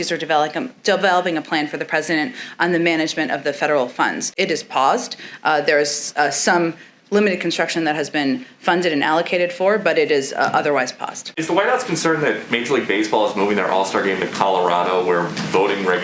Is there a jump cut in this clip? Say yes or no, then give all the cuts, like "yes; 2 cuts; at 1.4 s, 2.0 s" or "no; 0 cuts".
yes; 2 cuts; at 4.3 s, 11.3 s